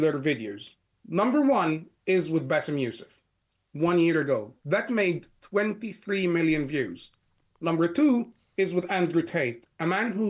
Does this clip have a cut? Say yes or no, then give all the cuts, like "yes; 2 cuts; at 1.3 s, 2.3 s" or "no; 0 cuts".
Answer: no; 0 cuts